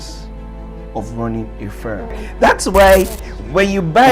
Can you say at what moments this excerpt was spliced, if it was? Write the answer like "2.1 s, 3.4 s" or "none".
2.2 s